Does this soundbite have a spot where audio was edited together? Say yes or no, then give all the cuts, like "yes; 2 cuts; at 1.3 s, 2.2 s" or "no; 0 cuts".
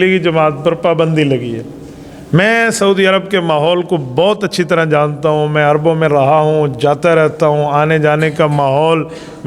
no; 0 cuts